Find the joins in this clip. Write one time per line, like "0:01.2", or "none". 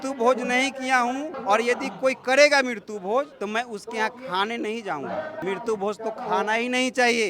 0:01.3
0:03.3
0:05.4